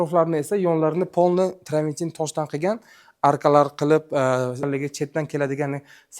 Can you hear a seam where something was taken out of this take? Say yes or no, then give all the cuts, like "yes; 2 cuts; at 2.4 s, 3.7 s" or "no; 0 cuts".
yes; 1 cut; at 4.7 s